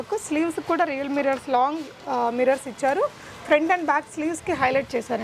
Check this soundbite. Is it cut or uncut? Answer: uncut